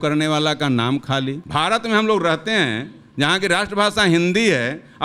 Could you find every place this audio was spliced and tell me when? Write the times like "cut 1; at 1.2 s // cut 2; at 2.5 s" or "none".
cut 1; at 1.4 s